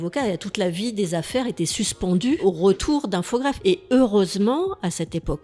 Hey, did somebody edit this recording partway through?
yes; 2 cuts; at 2.4 s, 3.6 s

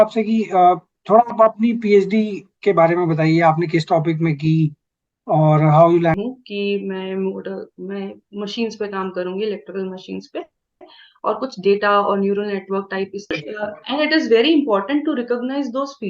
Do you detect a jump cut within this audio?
yes; 2 cuts; at 6.1 s, 13.3 s

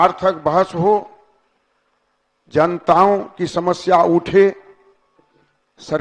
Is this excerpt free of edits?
yes; 0 cuts

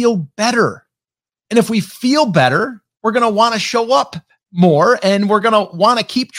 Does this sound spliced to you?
no; 0 cuts

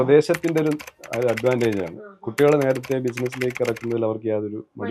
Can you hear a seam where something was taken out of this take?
no; 0 cuts

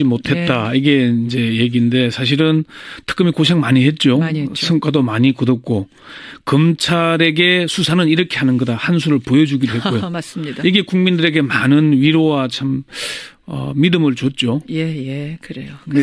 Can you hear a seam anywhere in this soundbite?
yes; 1 cut; at 13.0 s

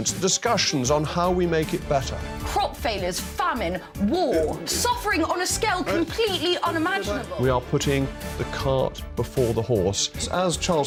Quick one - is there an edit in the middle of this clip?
no; 0 cuts

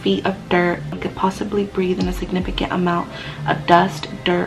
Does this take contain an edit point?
yes; 1 cut; at 1.0 s

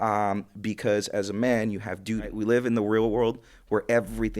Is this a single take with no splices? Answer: no; 1 cut; at 2.3 s

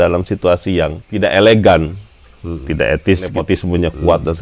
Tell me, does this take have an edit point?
yes; 2 cuts; at 1.0 s, 3.4 s

